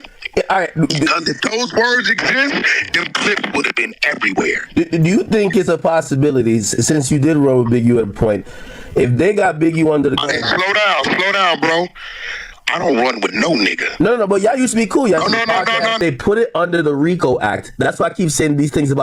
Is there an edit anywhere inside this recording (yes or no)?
yes